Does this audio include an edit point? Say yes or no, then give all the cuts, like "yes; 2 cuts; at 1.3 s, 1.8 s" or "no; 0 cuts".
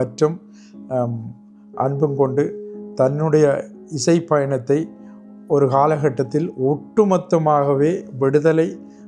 no; 0 cuts